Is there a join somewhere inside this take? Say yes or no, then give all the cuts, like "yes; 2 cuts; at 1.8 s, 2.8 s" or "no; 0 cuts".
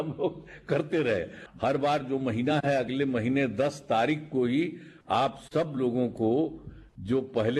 yes; 1 cut; at 1.4 s